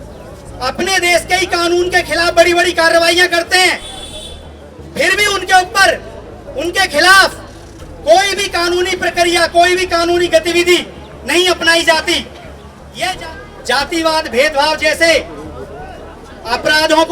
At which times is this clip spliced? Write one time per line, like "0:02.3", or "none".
0:13.2